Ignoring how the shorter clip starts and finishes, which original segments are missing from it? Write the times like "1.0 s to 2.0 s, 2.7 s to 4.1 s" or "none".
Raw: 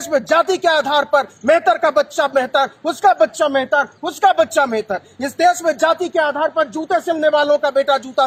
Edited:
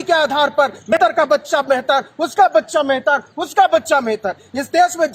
1.5 s to 1.6 s